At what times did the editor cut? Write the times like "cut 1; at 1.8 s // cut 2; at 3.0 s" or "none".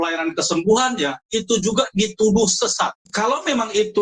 cut 1; at 3.0 s